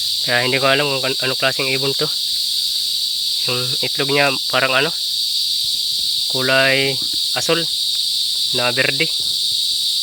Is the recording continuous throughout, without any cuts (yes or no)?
yes